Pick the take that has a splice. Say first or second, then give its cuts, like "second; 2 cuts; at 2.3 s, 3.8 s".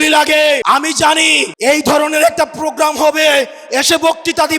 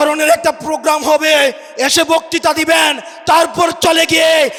first; 1 cut; at 0.9 s